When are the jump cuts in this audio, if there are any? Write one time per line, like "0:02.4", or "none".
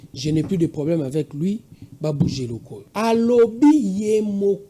0:02.8